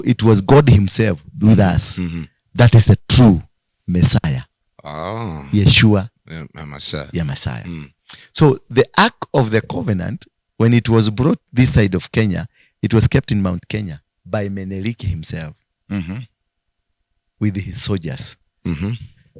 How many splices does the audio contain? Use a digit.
0